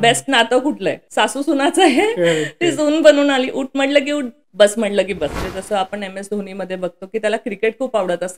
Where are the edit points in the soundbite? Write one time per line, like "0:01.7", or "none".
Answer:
0:01.0
0:04.4
0:05.4